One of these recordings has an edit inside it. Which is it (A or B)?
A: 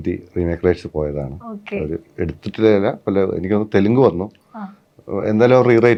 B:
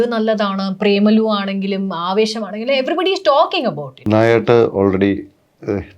B